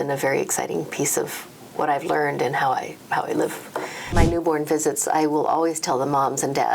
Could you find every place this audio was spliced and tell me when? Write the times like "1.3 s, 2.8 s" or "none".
4.1 s